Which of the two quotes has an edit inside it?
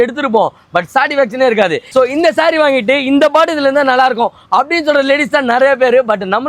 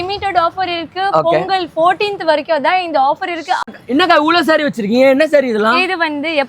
second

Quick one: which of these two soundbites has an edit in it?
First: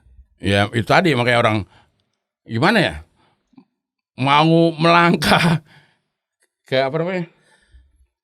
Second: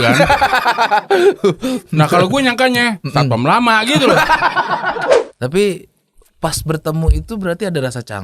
second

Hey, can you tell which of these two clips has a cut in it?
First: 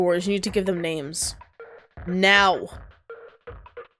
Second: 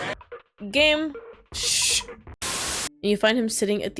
second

